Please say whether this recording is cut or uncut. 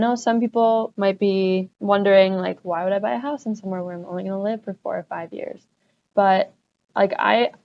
cut